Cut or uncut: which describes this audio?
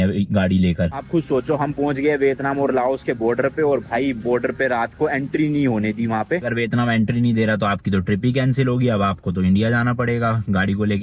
cut